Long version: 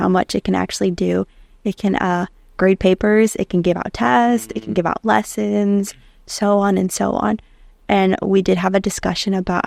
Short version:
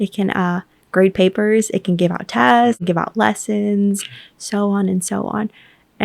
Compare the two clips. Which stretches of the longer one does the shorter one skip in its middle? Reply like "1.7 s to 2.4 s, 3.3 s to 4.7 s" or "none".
4.5 s to 4.7 s